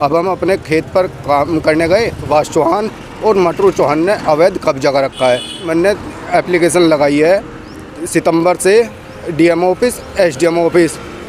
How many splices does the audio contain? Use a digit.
2